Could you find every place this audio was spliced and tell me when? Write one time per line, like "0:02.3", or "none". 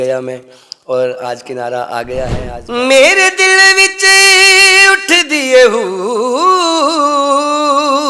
0:02.5